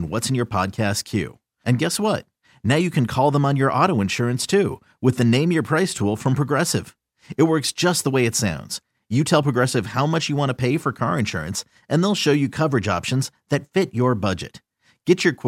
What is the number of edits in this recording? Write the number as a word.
zero